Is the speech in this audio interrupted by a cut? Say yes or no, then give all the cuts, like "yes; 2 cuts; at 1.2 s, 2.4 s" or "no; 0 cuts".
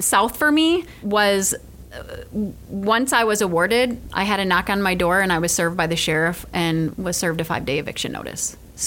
yes; 2 cuts; at 1.0 s, 4.1 s